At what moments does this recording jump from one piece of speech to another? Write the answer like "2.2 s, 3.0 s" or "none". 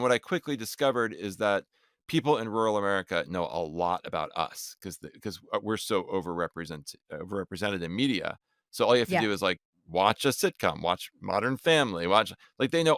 none

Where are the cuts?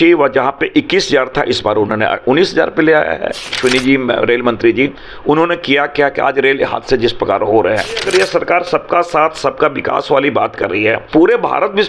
3.6 s, 8.1 s, 11.1 s

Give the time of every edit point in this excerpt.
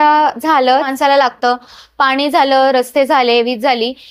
0.9 s

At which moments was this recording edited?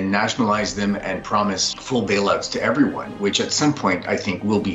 1.7 s

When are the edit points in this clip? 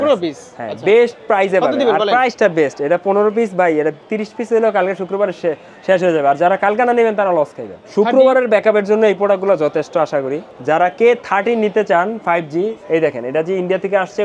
7.8 s, 10.5 s, 12.8 s

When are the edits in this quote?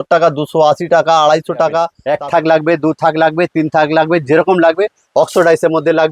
2.0 s

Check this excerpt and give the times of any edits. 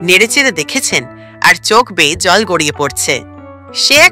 none

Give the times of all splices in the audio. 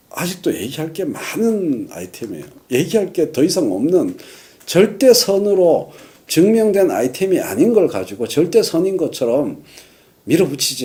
none

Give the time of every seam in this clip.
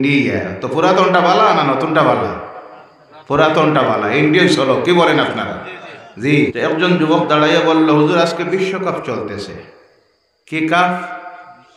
6.5 s

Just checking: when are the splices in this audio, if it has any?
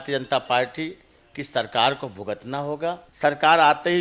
3.1 s

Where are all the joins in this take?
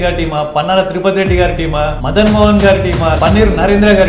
2.0 s, 3.2 s

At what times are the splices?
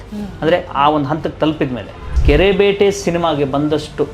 2.1 s

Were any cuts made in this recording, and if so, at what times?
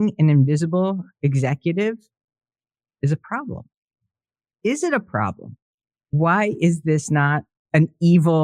6.1 s, 7.5 s

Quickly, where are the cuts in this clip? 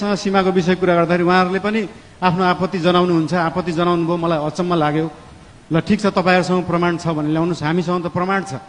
none

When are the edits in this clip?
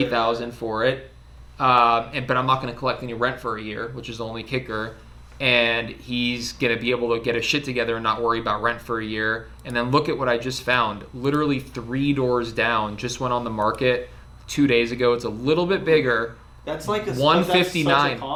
none

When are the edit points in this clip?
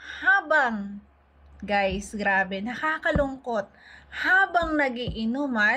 none

